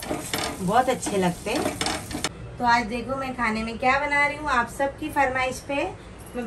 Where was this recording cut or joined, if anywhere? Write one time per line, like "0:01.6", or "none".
0:02.3